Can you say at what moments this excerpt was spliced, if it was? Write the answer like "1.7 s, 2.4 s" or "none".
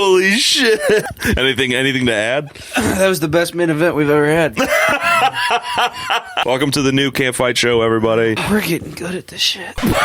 1.1 s, 6.4 s, 8.4 s